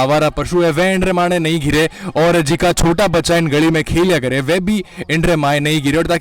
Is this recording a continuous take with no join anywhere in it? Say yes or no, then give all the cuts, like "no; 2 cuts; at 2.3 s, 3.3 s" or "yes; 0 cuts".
yes; 0 cuts